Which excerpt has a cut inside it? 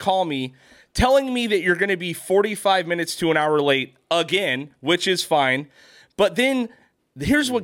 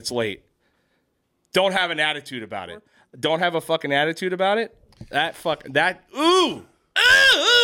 second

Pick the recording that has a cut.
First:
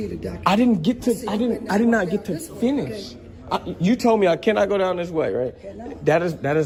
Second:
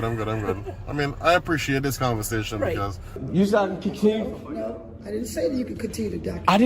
second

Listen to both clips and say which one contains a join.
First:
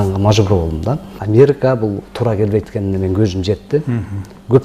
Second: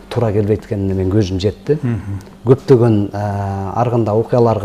first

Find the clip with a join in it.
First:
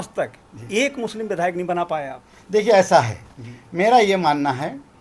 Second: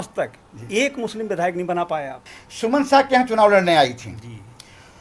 second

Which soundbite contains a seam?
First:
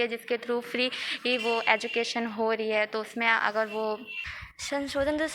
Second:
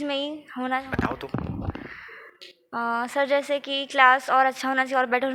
first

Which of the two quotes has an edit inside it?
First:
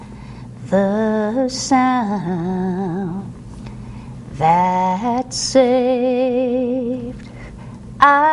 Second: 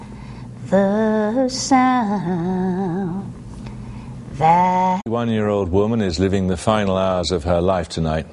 first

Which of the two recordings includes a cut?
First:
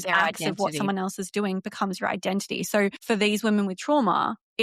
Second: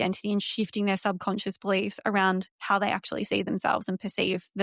first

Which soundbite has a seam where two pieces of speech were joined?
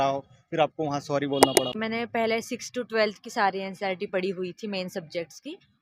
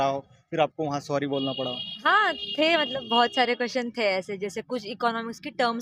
first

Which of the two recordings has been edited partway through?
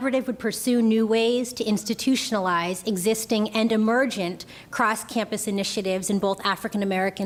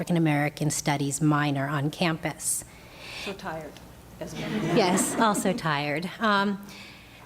second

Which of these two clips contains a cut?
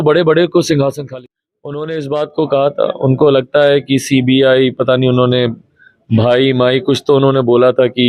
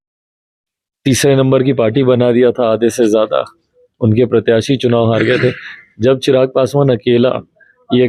first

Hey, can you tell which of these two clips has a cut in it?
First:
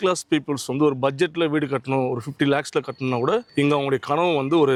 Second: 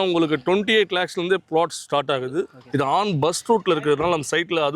second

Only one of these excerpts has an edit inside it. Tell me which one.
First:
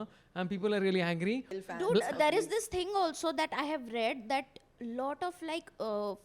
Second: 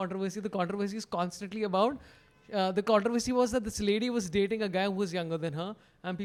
first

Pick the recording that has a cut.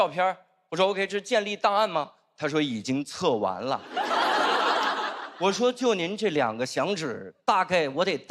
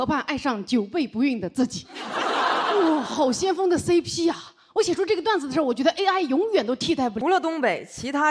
second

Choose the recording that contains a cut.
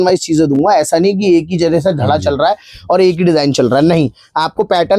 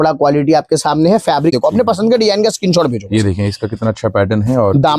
second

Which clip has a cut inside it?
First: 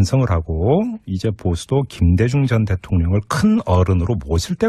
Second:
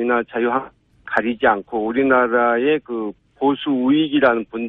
first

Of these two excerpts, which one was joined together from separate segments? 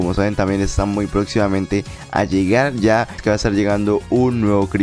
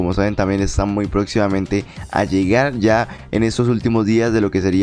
first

